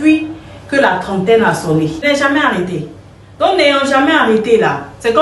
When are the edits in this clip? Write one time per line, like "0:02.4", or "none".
0:02.0

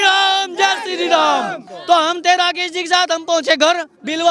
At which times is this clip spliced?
0:01.7

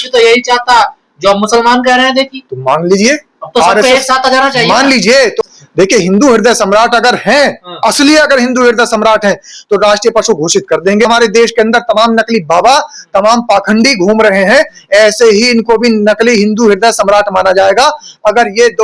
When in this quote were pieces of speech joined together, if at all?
0:05.4
0:11.0

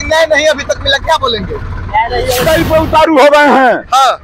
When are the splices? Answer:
0:02.5

